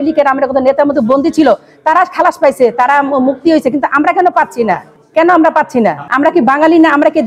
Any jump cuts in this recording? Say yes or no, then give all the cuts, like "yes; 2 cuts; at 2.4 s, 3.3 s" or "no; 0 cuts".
no; 0 cuts